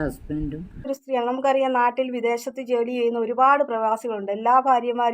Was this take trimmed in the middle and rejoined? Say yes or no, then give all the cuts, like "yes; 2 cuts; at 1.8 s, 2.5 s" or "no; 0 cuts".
yes; 1 cut; at 0.9 s